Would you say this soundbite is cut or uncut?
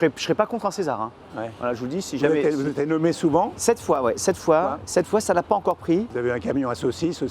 cut